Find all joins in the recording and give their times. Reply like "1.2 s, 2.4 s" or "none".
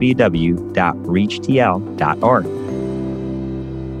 2.4 s

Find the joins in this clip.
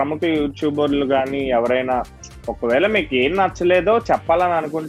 none

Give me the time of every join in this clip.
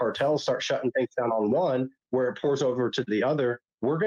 none

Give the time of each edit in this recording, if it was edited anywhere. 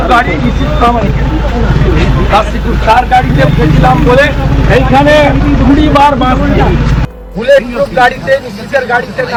none

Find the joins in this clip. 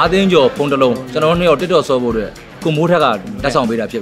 2.5 s

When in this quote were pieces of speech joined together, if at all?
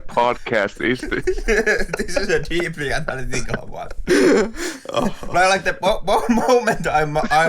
4.0 s

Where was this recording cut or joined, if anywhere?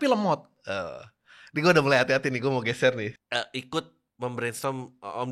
3.1 s, 4.0 s

